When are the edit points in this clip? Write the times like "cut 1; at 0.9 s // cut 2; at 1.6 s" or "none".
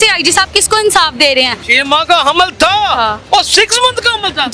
cut 1; at 1.7 s // cut 2; at 3.2 s